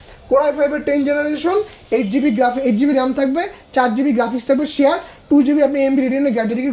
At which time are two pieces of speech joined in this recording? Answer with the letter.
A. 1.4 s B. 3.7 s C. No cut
C